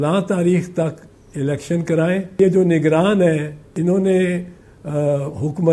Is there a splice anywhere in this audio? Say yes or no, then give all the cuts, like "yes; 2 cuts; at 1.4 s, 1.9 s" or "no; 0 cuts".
yes; 2 cuts; at 2.4 s, 3.6 s